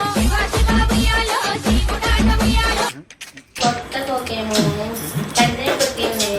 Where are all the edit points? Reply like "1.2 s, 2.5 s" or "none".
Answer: 1.5 s, 2.9 s